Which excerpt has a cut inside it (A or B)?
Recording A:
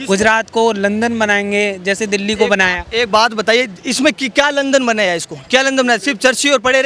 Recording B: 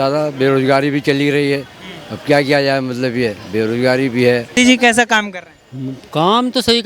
B